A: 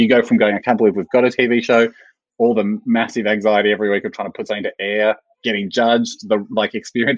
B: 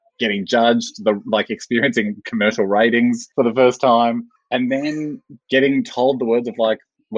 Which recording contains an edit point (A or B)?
B